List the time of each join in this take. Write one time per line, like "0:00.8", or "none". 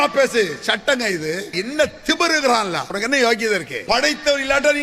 0:01.5
0:02.9
0:03.7